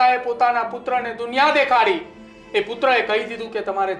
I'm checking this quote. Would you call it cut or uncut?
uncut